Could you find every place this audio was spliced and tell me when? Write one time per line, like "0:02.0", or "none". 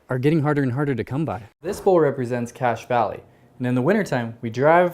0:01.7